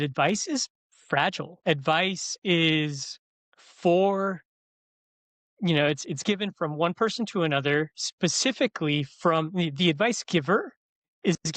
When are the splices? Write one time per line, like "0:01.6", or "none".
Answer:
0:01.5